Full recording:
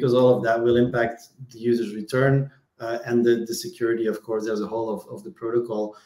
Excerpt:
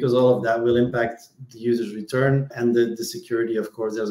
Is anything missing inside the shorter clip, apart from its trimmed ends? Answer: yes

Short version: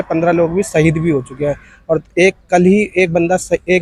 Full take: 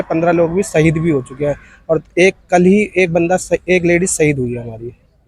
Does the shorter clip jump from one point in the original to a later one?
no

